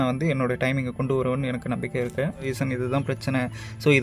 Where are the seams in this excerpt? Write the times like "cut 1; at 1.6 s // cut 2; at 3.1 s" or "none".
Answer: cut 1; at 2.5 s

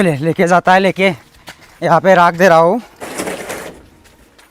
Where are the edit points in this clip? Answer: cut 1; at 3.0 s

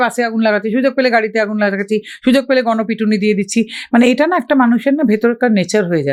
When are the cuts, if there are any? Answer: none

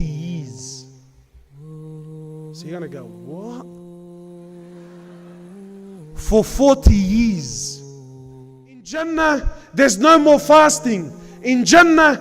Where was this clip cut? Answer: cut 1; at 9.0 s

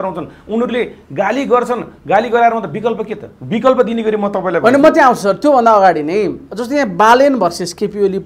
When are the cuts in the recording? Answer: none

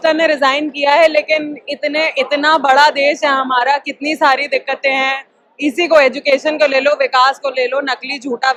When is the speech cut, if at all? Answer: none

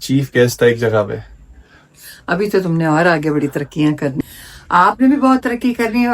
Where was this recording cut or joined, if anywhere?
cut 1; at 4.2 s

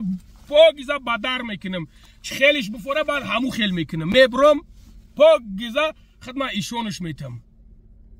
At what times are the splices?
none

